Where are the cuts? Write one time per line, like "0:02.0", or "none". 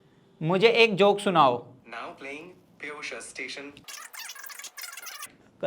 none